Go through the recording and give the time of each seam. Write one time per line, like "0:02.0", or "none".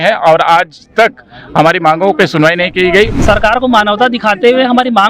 0:03.2